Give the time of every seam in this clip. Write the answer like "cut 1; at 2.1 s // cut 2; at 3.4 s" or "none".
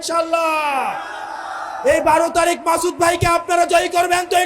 none